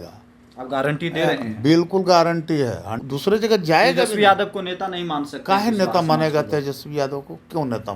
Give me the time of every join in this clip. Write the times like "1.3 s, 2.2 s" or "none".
2.9 s